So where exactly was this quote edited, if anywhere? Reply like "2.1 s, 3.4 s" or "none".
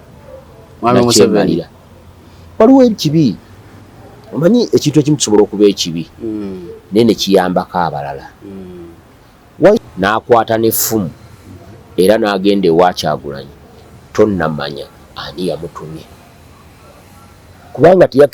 9.8 s